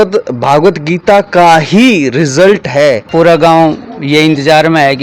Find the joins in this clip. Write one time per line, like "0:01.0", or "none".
0:03.1